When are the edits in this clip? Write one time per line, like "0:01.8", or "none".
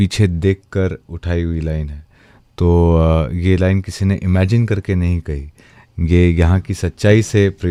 none